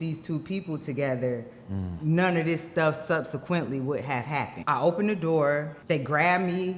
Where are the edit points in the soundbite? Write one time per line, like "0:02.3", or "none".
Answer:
0:04.5
0:05.7